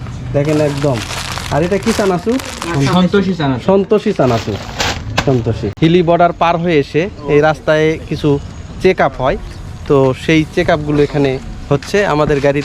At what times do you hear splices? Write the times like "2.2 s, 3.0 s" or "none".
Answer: 5.7 s